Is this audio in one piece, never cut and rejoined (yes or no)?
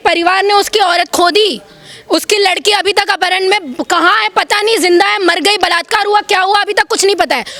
yes